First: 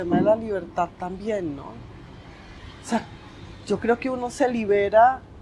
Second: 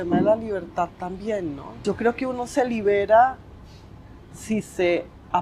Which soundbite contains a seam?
second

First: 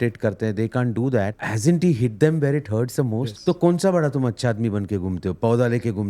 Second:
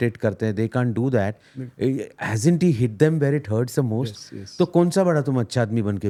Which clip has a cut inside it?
first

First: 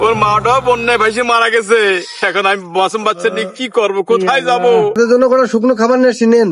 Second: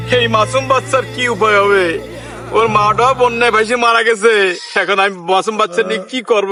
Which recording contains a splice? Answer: first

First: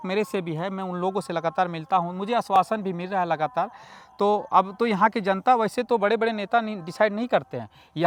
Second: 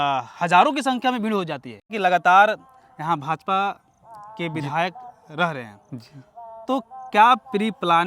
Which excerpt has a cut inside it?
second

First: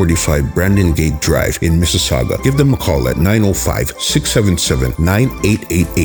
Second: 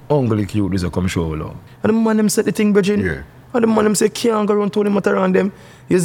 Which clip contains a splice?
second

